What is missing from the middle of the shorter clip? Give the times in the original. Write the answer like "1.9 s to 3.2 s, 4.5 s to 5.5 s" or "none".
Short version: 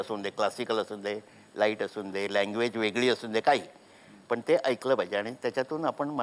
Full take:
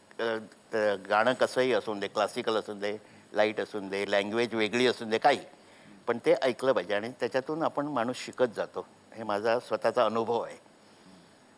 none